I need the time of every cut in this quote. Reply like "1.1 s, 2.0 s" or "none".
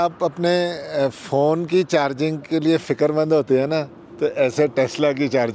none